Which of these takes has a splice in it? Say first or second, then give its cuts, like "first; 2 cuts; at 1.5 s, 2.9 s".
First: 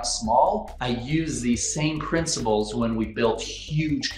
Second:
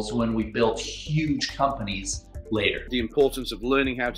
second; 1 cut; at 2.9 s